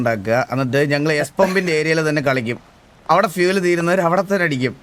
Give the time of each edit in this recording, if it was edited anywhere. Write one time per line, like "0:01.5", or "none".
none